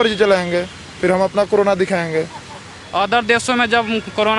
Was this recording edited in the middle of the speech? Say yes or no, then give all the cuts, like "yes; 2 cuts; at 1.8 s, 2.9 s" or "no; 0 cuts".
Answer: yes; 1 cut; at 2.8 s